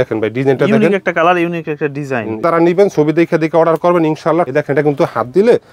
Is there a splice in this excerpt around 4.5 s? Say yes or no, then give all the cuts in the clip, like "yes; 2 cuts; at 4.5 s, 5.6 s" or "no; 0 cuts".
yes; 2 cuts; at 2.4 s, 4.5 s